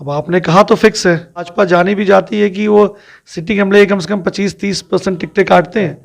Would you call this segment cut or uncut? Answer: cut